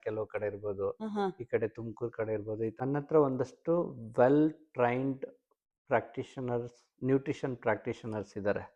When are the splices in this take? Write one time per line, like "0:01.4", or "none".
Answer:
0:02.7

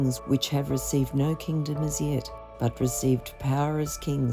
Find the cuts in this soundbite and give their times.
none

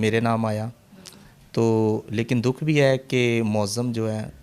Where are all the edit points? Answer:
none

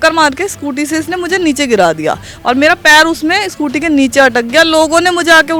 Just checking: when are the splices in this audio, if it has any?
none

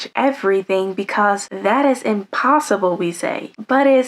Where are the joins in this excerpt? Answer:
0:01.5

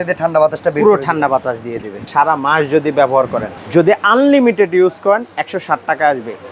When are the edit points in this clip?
0:02.0
0:03.5

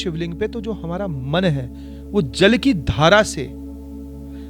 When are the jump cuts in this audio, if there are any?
none

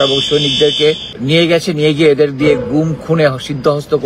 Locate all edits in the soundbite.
0:01.1

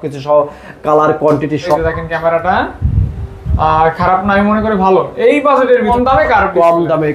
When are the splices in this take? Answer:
0:01.8
0:05.9

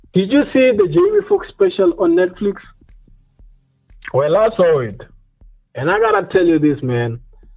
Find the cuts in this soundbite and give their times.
none

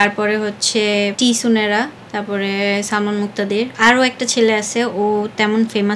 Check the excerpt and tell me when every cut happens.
0:01.1
0:02.0
0:03.7

